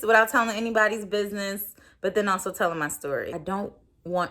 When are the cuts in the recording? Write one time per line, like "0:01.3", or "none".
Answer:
0:03.4